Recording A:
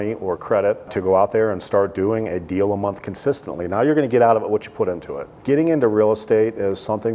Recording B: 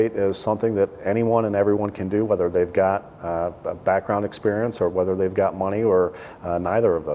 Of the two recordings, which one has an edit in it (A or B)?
A